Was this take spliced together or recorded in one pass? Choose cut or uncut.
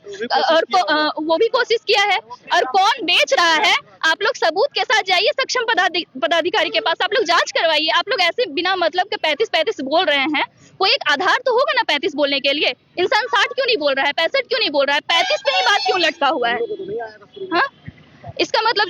uncut